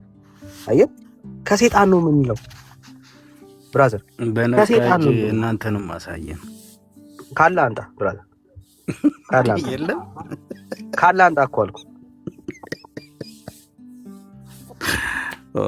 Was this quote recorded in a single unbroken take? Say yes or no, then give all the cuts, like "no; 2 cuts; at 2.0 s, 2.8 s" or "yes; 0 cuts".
no; 2 cuts; at 13.6 s, 14.7 s